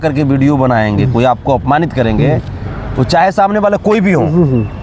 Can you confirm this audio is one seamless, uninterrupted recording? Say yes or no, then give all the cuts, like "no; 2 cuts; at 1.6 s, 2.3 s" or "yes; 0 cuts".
yes; 0 cuts